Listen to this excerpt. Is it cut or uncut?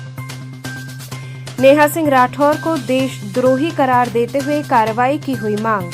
cut